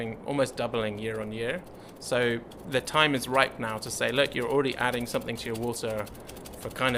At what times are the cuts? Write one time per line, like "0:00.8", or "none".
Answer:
none